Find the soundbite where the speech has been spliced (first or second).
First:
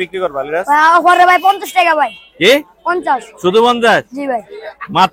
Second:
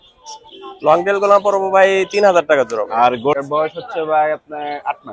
second